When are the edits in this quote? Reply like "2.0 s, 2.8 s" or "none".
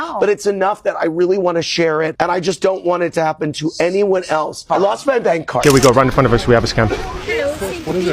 5.6 s